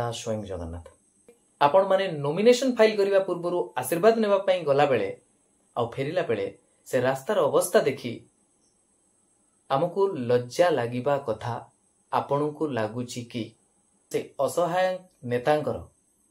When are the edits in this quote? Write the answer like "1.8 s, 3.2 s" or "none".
1.4 s, 14.1 s